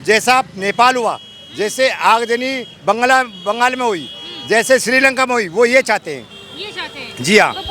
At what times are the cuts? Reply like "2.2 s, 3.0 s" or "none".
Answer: none